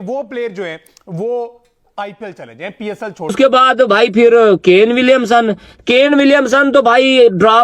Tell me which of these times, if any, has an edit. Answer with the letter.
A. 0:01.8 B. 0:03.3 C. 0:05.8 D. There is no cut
B